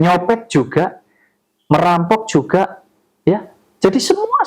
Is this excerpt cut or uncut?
cut